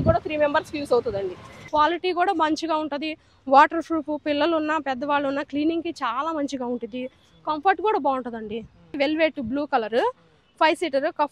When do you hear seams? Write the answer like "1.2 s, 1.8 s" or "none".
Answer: 1.5 s, 9.0 s